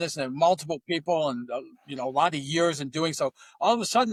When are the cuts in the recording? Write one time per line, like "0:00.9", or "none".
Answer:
none